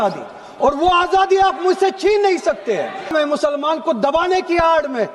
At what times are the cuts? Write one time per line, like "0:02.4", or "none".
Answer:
0:03.1